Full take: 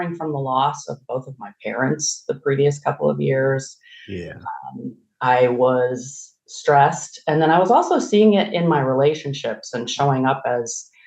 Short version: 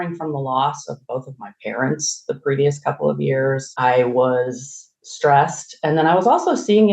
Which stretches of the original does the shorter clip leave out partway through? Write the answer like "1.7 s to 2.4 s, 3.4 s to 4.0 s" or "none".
3.7 s to 5.1 s